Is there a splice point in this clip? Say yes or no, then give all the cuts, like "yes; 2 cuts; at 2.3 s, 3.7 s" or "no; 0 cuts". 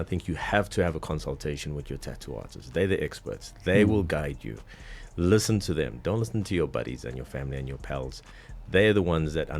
no; 0 cuts